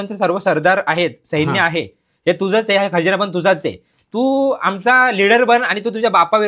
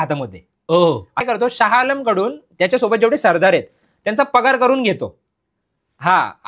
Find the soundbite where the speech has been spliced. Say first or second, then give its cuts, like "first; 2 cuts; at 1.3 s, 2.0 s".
second; 1 cut; at 1.2 s